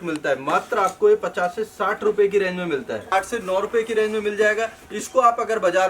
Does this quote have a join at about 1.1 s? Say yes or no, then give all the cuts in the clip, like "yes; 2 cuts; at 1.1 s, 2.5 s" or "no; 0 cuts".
no; 1 cut; at 3.1 s